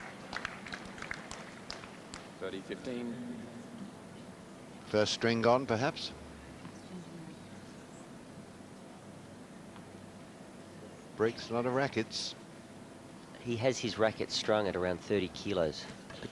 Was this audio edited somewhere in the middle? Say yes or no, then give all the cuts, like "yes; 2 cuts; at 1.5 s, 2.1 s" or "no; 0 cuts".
no; 0 cuts